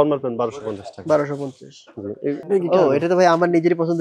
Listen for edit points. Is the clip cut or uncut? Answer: cut